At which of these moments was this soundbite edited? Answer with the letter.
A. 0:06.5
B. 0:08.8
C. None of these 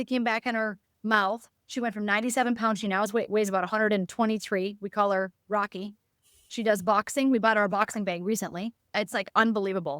B